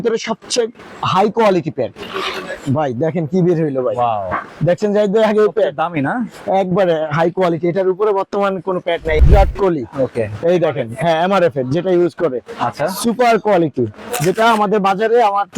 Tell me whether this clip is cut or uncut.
cut